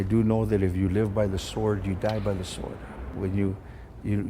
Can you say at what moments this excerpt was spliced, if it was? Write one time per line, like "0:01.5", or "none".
0:03.1